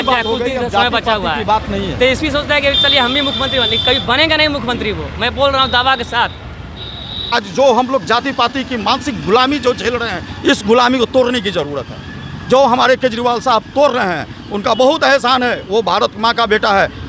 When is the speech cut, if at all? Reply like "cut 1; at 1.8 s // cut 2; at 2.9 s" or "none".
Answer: cut 1; at 7.3 s